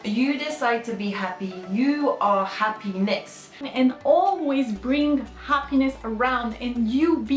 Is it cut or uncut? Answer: cut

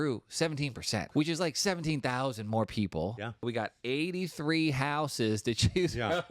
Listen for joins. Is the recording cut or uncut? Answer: cut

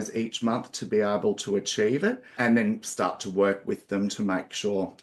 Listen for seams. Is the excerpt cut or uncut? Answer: cut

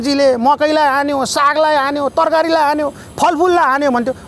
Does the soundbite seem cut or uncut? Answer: uncut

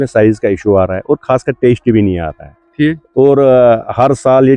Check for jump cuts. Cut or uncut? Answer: uncut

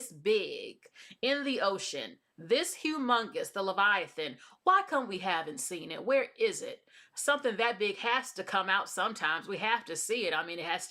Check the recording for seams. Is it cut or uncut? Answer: uncut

